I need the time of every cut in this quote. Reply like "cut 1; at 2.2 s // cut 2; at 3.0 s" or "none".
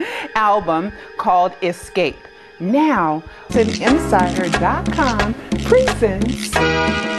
none